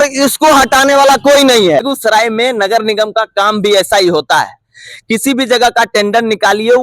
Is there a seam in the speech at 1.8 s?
yes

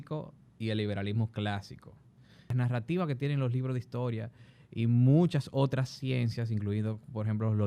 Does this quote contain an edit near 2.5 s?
yes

